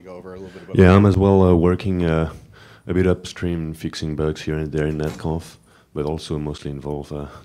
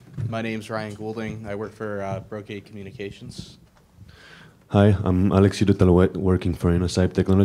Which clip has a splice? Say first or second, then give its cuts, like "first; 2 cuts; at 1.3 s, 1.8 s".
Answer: first; 1 cut; at 6.3 s